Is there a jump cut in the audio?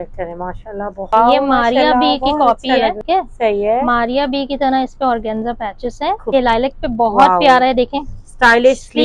yes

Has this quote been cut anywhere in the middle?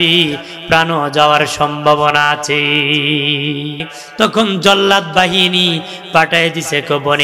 yes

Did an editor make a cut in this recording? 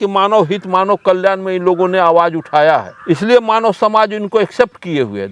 no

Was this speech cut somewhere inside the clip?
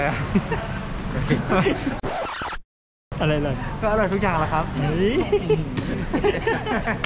no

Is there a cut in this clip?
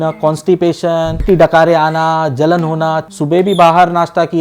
yes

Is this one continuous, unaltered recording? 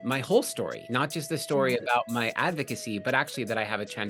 yes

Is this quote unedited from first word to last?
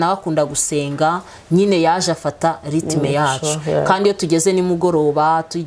yes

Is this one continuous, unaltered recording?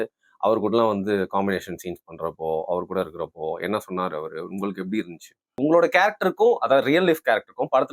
no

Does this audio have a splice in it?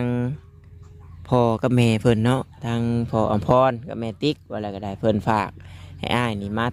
no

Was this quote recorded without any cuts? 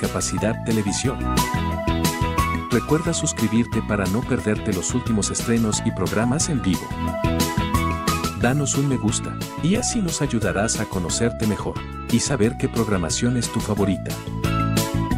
yes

